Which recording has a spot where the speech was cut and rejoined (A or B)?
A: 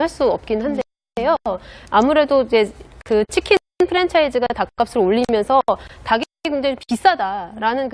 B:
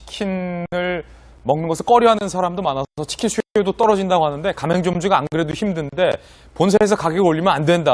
A